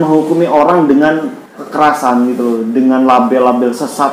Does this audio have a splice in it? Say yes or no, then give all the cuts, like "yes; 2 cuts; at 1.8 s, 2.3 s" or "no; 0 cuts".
yes; 1 cut; at 1.6 s